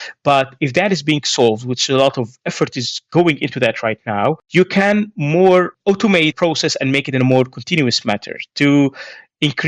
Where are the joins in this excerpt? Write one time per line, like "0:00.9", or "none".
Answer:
0:06.3